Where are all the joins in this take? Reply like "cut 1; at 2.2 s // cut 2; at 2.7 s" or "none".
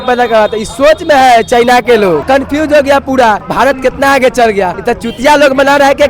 cut 1; at 2.2 s // cut 2; at 3.5 s // cut 3; at 4.8 s